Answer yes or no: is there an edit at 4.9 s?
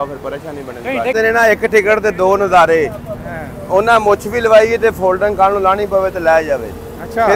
no